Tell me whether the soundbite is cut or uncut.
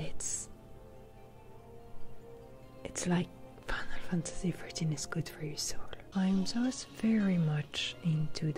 cut